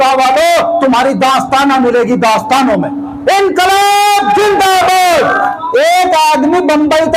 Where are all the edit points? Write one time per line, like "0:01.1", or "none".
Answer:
0:05.6